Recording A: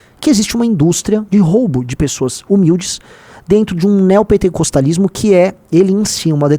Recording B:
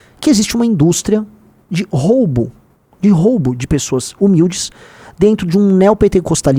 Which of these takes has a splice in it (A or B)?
A